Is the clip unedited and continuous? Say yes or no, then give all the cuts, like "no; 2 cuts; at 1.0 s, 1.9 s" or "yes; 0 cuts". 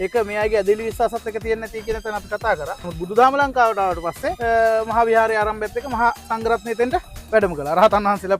no; 2 cuts; at 2.8 s, 4.4 s